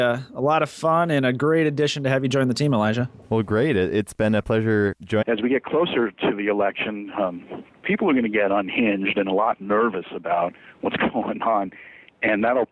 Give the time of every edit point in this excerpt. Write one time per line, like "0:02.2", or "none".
none